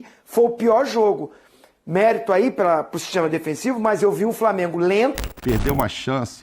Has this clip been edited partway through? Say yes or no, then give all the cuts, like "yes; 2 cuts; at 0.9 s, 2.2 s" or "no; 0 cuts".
yes; 1 cut; at 5.3 s